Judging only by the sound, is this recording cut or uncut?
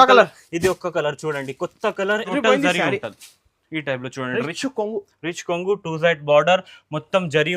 cut